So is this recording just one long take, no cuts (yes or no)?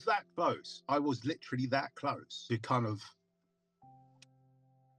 no